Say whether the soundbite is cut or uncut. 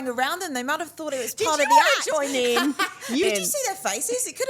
cut